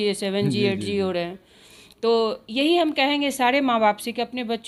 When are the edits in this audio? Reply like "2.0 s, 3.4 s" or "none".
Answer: none